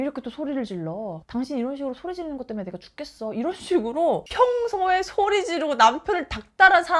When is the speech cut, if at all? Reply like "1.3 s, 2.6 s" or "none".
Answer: 4.2 s